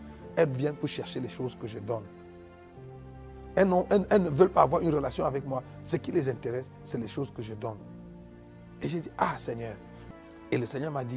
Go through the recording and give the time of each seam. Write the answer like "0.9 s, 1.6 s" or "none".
9.9 s